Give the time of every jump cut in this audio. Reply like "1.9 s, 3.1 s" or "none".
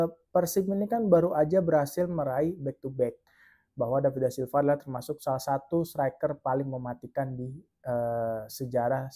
3.3 s